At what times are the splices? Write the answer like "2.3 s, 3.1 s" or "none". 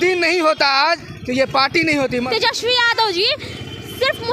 2.3 s